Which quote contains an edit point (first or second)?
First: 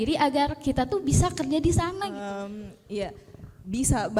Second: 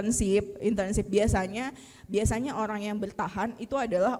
first